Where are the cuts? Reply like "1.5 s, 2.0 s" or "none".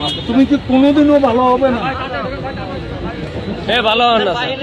none